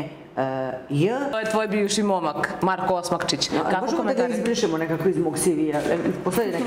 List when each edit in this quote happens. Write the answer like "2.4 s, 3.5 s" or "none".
1.4 s